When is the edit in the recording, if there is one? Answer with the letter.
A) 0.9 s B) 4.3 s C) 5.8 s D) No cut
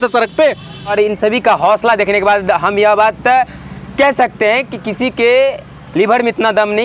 A